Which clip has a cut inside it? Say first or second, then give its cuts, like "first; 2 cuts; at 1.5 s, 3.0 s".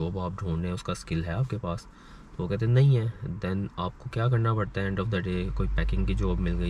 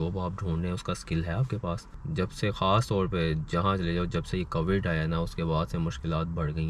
second; 1 cut; at 1.9 s